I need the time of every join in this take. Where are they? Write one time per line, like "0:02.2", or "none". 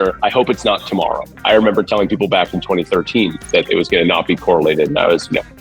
0:01.3